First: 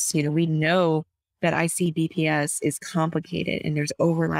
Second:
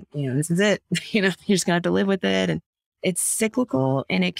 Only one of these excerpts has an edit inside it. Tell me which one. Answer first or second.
second